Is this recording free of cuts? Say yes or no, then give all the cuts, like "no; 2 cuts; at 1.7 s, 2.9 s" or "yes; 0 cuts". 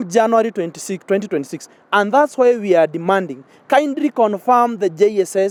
yes; 0 cuts